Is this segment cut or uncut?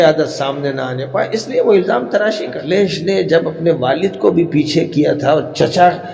cut